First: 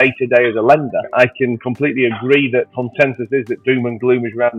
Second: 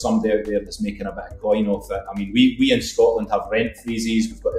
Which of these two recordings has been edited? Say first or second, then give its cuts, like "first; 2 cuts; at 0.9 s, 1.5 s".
first; 2 cuts; at 1.1 s, 2.7 s